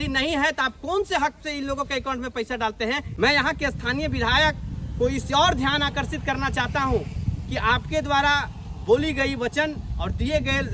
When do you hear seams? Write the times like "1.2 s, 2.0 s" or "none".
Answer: 3.1 s